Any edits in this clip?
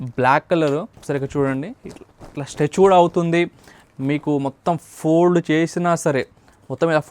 yes; 1 cut; at 0.9 s

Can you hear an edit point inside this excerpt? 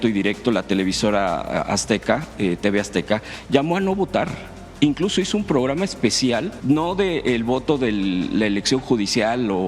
yes; 1 cut; at 6.5 s

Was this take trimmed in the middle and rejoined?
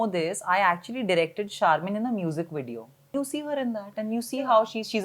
yes; 1 cut; at 3.1 s

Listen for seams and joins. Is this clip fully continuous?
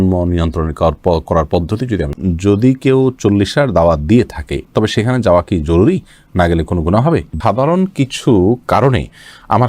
no; 2 cuts; at 2.1 s, 7.3 s

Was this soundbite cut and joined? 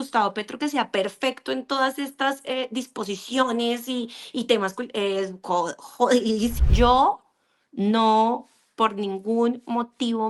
yes; 1 cut; at 6.5 s

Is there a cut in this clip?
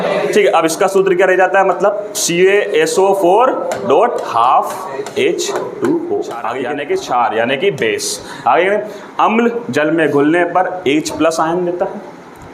yes; 1 cut; at 6.6 s

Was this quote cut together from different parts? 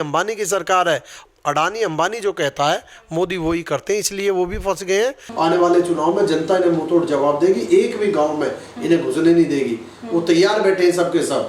yes; 2 cuts; at 1.2 s, 5.2 s

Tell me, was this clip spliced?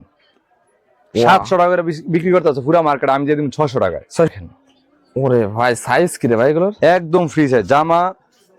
yes; 1 cut; at 4.3 s

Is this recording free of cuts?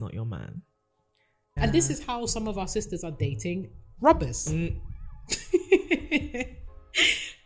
no; 1 cut; at 1.5 s

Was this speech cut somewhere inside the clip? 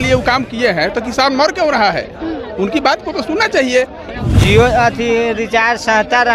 yes; 1 cut; at 4.2 s

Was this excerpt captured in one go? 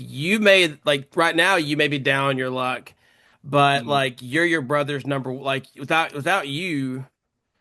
yes; 0 cuts

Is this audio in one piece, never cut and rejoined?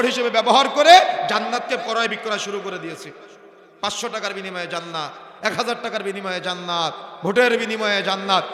yes; 0 cuts

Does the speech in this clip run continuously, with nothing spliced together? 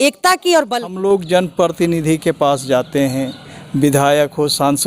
no; 1 cut; at 1.0 s

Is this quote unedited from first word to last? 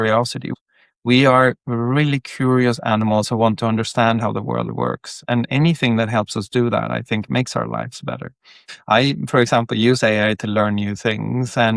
no; 1 cut; at 8.7 s

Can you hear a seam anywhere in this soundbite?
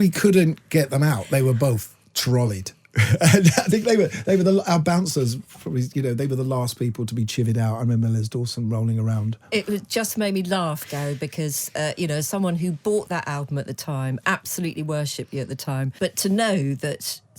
yes; 1 cut; at 15.9 s

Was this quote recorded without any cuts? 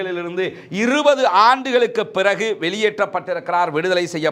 yes; 0 cuts

